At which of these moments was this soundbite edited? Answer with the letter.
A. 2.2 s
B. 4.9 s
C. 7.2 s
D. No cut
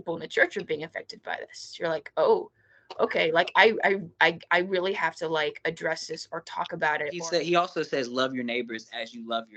C